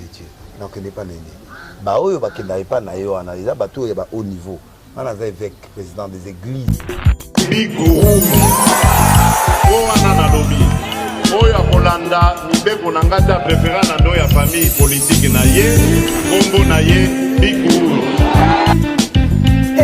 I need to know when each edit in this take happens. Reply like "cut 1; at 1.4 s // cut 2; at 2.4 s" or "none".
cut 1; at 6.7 s